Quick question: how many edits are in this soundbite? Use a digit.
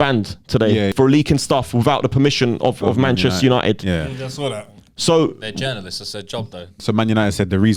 2